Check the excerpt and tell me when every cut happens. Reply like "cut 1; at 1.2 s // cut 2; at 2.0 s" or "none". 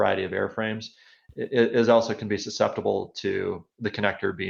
none